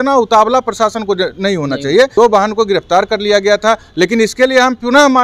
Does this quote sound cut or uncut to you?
cut